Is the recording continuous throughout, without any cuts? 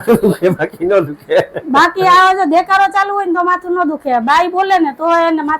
yes; 0 cuts

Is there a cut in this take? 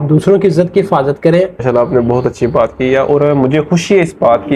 yes; 1 cut; at 1.6 s

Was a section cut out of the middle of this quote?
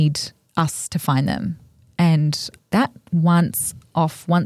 yes; 1 cut; at 2.6 s

